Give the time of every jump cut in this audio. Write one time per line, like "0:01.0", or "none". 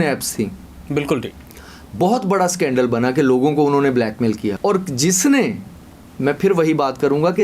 0:04.5